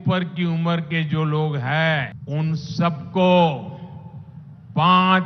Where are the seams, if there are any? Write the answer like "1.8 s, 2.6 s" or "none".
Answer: 2.2 s